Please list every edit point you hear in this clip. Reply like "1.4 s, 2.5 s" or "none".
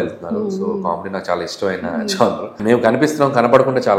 2.6 s